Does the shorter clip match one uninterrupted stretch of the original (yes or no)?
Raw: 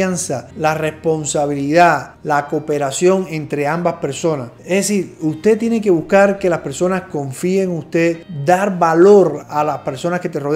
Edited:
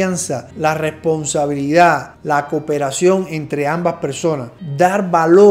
no